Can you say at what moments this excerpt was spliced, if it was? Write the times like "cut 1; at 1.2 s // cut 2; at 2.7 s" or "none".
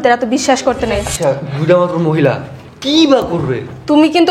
cut 1; at 1.1 s